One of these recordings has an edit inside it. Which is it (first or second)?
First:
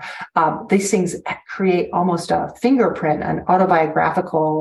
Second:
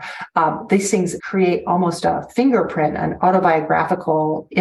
second